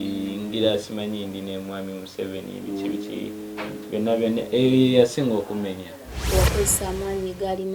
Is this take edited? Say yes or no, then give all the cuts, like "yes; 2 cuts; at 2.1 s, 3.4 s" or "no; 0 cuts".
yes; 1 cut; at 6.3 s